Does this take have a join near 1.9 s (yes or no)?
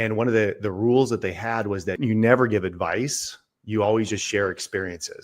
yes